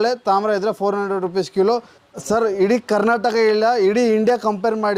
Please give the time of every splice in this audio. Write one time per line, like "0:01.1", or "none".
0:02.0